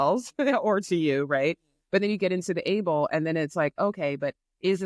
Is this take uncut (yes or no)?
yes